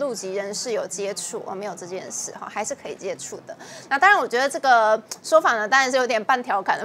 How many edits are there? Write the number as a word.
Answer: zero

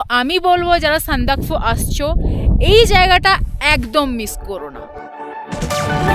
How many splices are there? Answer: one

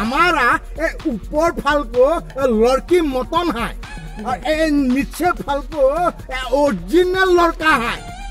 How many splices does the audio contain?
zero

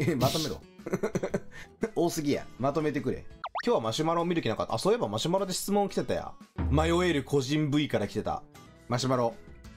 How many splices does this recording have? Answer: zero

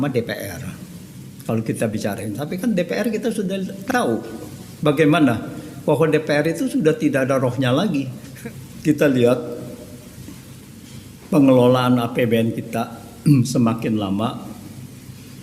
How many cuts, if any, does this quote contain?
one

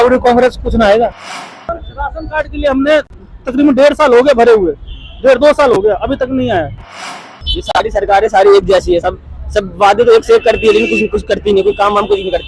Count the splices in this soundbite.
two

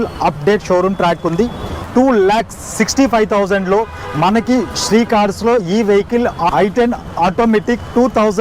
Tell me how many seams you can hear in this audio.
two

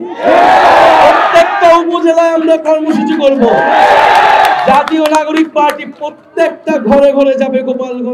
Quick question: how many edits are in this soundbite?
zero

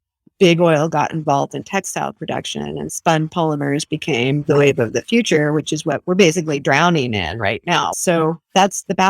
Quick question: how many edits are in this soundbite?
one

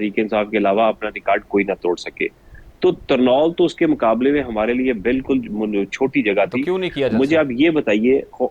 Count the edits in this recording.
zero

